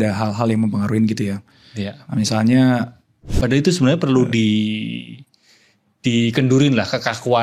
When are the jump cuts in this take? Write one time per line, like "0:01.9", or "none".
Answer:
0:03.3